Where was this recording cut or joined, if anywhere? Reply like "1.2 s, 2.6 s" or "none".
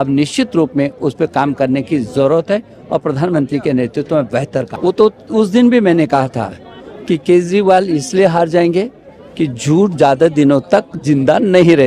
4.7 s